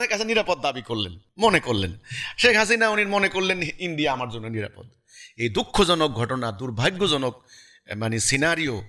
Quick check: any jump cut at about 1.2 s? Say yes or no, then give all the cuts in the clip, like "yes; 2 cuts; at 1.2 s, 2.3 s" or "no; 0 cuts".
yes; 1 cut; at 1.2 s